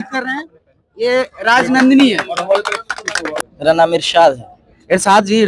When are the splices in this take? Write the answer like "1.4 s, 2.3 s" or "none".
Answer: 3.4 s